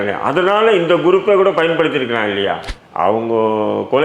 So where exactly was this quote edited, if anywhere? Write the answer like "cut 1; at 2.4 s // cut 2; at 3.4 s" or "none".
cut 1; at 2.7 s